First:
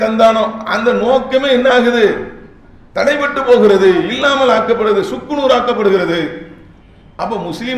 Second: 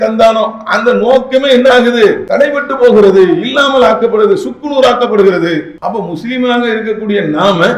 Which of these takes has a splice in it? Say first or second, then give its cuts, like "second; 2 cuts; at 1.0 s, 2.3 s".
second; 2 cuts; at 2.2 s, 5.7 s